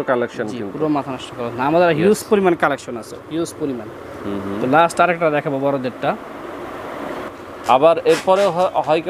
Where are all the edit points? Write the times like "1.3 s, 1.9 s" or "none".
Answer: 7.3 s